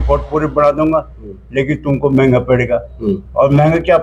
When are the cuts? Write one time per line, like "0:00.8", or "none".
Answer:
none